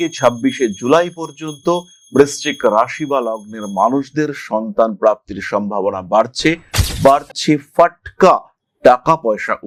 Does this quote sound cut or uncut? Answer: uncut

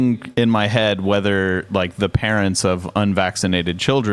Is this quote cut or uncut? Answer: uncut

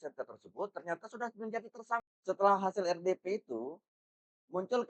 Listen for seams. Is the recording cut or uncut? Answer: cut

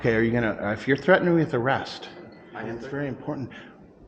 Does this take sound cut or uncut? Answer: cut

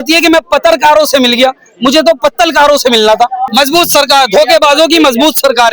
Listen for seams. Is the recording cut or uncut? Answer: cut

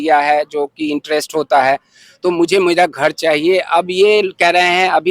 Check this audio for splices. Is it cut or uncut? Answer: uncut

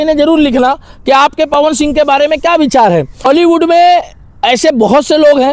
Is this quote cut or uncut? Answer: cut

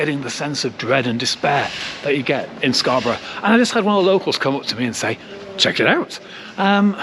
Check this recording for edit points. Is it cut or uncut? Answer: uncut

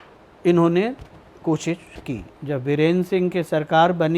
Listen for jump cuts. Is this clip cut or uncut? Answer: cut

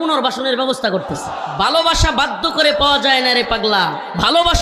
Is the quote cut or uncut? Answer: cut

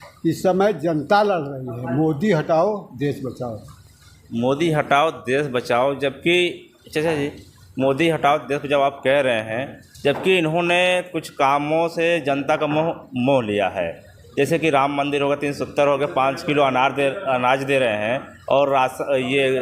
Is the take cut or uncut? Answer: uncut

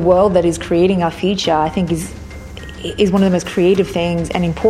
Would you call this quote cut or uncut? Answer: uncut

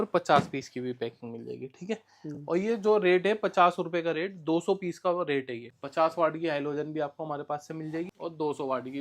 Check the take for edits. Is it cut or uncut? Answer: cut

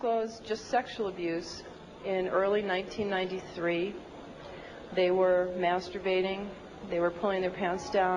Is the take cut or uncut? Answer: cut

